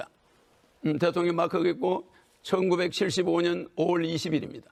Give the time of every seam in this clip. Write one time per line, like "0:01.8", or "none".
none